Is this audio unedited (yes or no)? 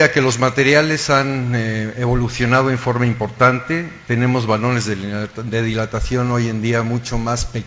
no